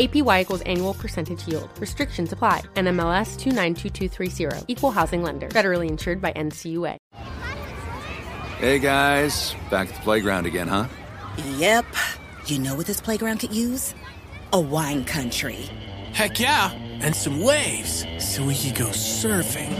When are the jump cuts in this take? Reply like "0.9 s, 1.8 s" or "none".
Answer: 7.0 s